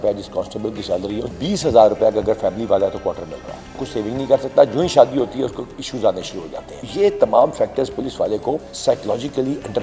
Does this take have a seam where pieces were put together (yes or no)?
yes